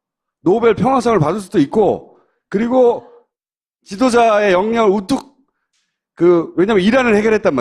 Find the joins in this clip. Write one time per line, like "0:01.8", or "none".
0:04.8